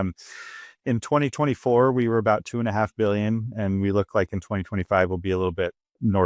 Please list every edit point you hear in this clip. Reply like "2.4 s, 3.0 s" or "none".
none